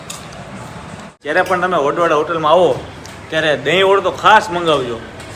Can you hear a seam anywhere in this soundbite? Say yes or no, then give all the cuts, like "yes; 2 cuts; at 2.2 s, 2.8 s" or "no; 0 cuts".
yes; 1 cut; at 1.2 s